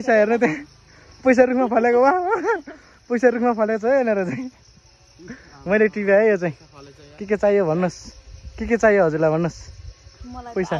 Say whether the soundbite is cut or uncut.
uncut